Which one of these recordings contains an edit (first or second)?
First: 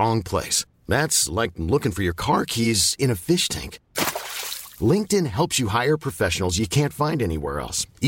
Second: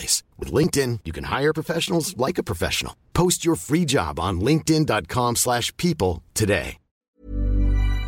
second